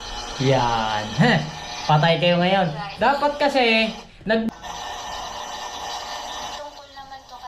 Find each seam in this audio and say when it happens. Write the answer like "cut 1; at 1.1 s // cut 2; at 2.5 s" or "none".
cut 1; at 4.5 s